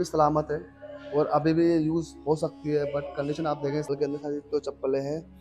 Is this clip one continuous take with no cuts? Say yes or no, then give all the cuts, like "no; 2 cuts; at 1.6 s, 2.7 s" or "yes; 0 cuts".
no; 1 cut; at 3.9 s